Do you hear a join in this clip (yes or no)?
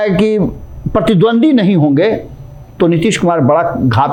no